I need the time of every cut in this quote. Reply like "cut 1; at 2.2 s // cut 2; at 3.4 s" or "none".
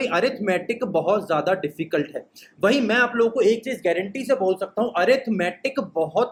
none